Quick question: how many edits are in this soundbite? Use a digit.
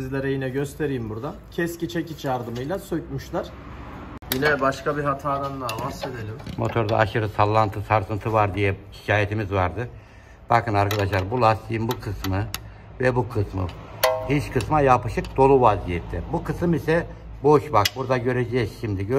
1